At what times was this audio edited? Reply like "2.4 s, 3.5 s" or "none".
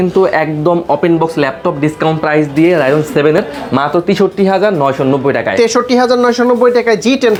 none